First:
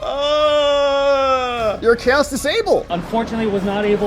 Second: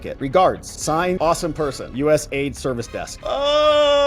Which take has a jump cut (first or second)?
first